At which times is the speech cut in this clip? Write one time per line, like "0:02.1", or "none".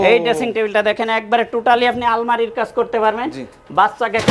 none